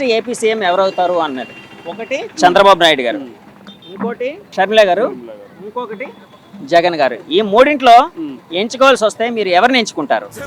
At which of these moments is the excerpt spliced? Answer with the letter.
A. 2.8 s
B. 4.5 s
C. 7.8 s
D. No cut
B